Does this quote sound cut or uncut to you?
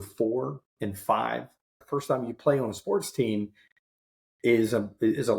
cut